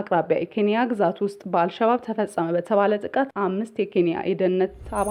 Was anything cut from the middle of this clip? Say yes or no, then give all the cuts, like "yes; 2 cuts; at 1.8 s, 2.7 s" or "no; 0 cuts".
no; 0 cuts